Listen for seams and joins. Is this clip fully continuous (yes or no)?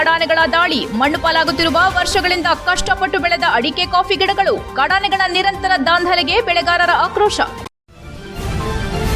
no